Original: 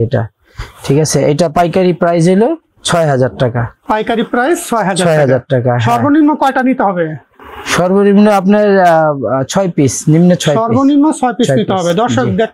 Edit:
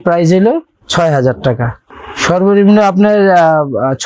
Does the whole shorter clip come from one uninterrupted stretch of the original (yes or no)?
no